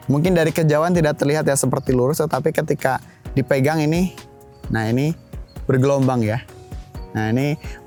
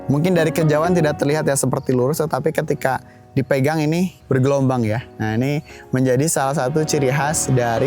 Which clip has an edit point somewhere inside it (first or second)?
second